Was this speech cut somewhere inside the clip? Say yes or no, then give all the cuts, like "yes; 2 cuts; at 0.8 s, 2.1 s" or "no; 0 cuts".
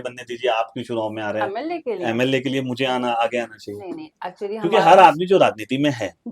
no; 0 cuts